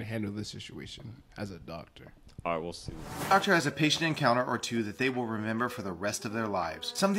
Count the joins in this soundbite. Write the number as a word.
one